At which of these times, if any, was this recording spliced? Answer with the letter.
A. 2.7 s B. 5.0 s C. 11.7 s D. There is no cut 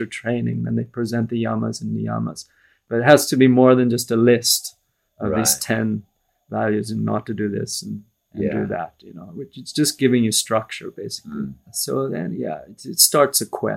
C